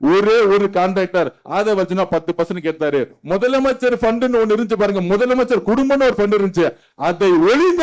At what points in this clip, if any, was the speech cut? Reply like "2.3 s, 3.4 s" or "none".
none

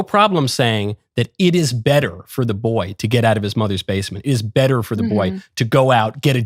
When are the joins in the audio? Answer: none

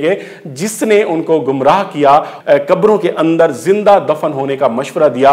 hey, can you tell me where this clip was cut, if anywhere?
none

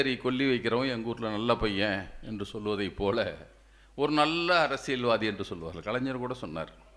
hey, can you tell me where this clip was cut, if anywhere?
none

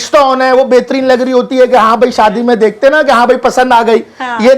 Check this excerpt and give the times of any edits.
none

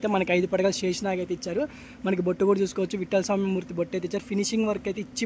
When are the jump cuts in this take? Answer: none

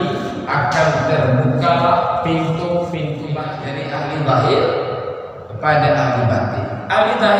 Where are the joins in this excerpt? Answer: 3.6 s

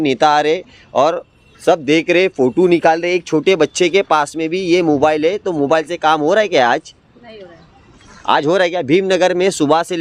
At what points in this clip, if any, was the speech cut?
none

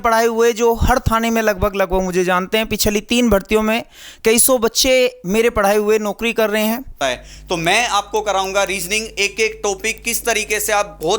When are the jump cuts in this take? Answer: 7.0 s

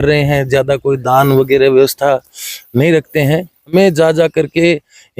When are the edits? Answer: 3.7 s

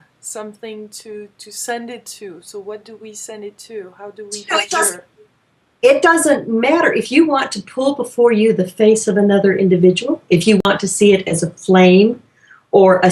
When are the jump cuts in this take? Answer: 8.5 s

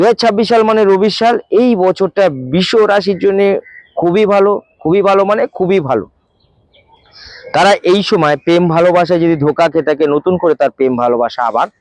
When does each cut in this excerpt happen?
none

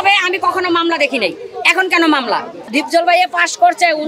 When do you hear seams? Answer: 2.6 s

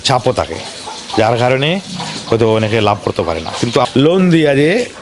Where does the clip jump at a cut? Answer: 3.9 s

